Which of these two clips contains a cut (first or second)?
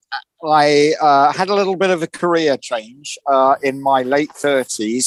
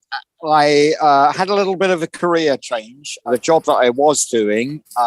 second